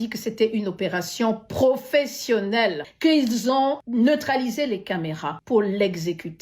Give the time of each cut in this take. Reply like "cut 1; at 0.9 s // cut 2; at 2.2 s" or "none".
cut 1; at 2.9 s // cut 2; at 3.8 s // cut 3; at 5.3 s